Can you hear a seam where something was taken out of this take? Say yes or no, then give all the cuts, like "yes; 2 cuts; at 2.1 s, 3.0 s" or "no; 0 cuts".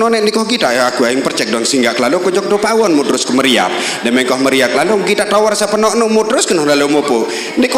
no; 0 cuts